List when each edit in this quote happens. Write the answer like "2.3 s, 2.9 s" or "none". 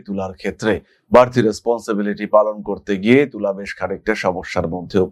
none